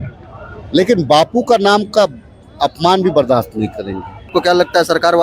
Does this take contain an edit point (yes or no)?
yes